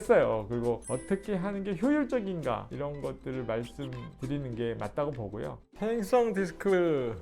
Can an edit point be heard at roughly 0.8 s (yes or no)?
yes